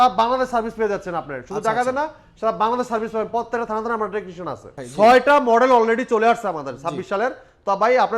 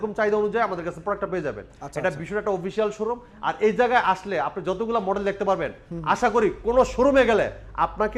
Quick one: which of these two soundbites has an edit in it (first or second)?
first